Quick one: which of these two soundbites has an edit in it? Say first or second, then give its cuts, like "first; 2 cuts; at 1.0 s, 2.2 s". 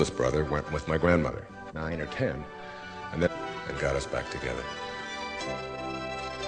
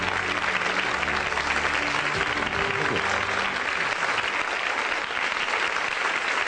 second; 1 cut; at 4.8 s